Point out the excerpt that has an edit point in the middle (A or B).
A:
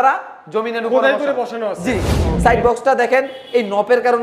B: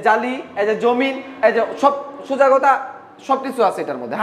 A